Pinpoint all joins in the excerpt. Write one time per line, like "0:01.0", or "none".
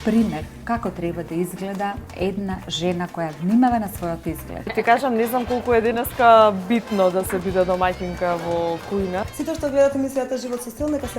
0:04.6
0:09.2